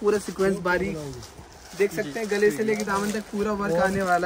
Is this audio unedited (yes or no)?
yes